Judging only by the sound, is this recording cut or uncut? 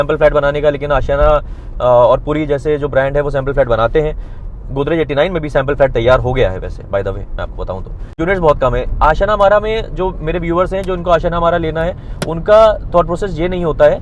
cut